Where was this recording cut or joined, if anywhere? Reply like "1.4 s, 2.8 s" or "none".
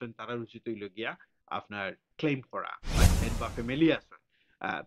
3.0 s